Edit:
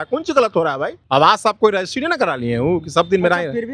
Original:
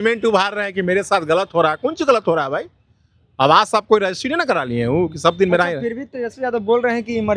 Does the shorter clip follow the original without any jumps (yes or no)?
no